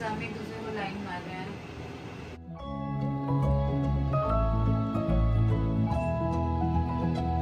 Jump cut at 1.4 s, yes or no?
no